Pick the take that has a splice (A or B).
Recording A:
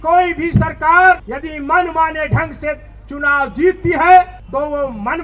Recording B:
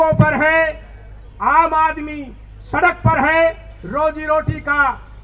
A